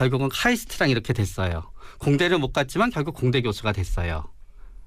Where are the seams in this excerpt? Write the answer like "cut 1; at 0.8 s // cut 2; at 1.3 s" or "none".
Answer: cut 1; at 2.7 s